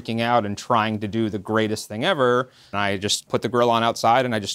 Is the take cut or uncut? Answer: cut